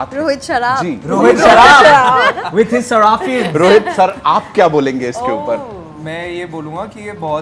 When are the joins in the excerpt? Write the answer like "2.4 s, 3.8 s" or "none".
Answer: none